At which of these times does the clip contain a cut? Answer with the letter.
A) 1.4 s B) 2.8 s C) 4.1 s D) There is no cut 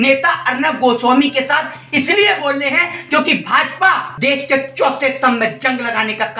C